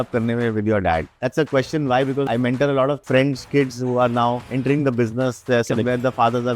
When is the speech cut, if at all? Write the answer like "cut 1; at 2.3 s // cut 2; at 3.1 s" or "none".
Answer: cut 1; at 1.2 s // cut 2; at 2.3 s // cut 3; at 3.0 s // cut 4; at 4.5 s